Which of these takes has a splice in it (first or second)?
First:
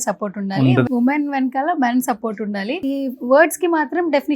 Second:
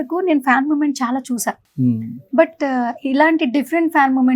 first